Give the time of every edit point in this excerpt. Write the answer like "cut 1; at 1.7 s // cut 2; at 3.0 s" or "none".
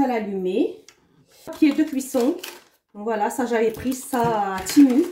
cut 1; at 1.4 s